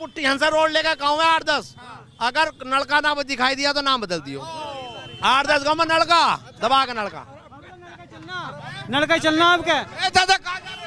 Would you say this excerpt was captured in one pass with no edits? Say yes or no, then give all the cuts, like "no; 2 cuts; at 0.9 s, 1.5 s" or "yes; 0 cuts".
yes; 0 cuts